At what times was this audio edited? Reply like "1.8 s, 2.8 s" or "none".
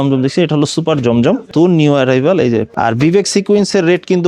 1.5 s, 2.7 s